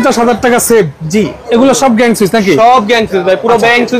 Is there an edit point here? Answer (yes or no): yes